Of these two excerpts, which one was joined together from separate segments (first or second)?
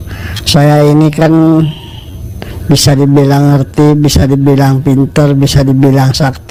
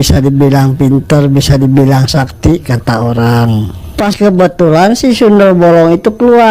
second